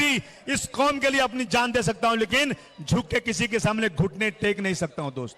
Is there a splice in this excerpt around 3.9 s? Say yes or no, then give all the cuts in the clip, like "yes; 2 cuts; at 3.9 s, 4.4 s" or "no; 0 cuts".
yes; 1 cut; at 3.9 s